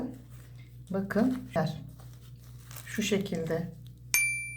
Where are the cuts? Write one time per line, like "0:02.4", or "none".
none